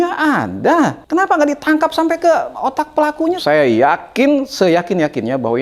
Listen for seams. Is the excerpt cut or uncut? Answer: cut